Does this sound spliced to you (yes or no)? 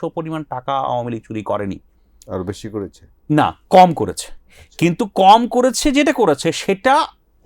no